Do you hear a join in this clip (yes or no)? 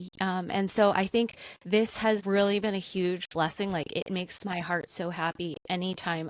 yes